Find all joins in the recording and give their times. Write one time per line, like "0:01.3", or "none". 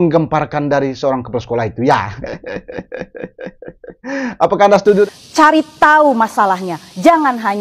0:05.1